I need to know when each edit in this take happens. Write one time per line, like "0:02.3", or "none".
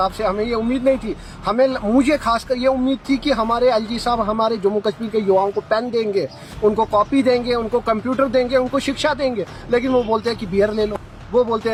none